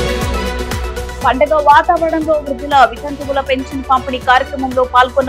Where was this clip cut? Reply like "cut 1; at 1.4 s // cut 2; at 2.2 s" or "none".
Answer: cut 1; at 0.9 s